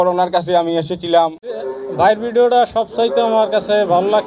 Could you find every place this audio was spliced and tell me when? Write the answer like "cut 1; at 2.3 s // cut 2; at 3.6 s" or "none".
cut 1; at 1.4 s